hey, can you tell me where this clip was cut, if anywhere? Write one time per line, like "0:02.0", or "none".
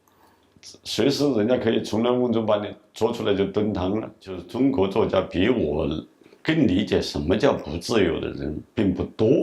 0:04.4